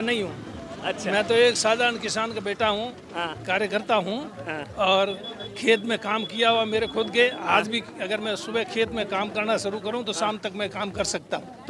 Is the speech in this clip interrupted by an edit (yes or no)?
no